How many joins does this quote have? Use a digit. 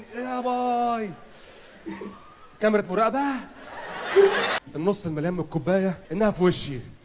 1